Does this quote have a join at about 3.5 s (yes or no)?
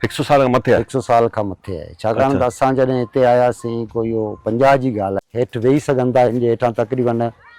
no